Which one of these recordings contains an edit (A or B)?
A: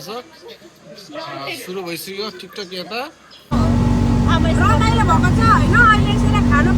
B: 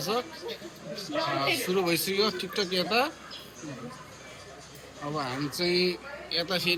A